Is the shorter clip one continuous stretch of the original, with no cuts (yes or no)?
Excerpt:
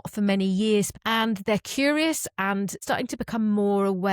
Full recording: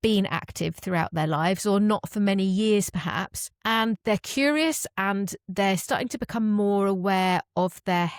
no